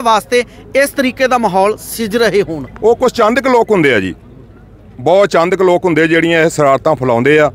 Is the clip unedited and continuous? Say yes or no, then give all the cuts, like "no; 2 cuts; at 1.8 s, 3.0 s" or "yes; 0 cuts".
yes; 0 cuts